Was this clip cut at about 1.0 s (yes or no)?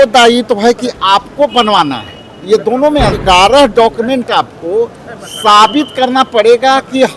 no